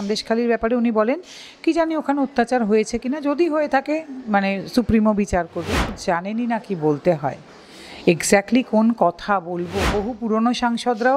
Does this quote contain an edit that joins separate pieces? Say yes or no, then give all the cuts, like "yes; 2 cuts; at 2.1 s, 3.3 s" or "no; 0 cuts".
yes; 2 cuts; at 6.0 s, 9.9 s